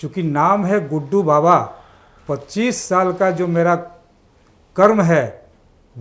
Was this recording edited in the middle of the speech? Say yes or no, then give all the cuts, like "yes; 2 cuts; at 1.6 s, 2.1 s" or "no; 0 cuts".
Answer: no; 0 cuts